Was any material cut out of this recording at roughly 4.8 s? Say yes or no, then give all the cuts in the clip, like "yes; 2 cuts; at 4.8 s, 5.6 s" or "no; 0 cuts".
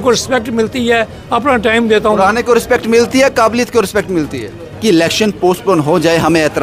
yes; 1 cut; at 4.8 s